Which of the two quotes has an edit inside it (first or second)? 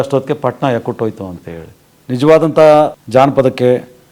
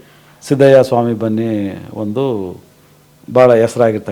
first